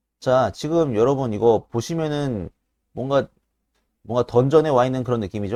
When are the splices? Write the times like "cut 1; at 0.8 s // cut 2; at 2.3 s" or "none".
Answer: none